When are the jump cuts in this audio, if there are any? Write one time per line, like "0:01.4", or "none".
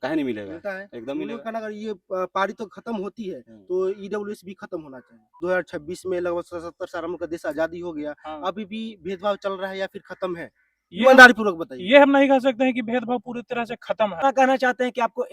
0:05.4
0:14.2